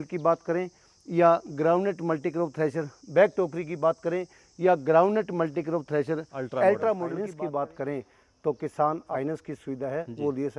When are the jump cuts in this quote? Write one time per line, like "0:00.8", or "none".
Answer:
0:07.2
0:09.1